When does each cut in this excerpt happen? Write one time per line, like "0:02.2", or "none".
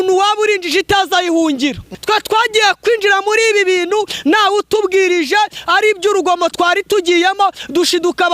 0:01.9